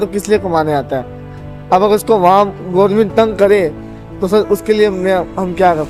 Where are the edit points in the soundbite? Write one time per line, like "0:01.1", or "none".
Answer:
none